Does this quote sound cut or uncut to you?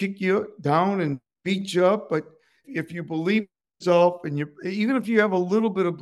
uncut